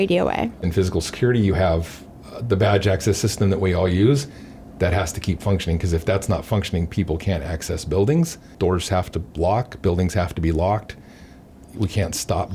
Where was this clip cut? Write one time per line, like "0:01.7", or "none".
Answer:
0:08.5